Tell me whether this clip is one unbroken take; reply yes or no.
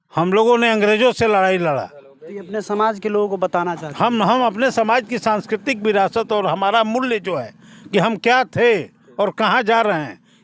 yes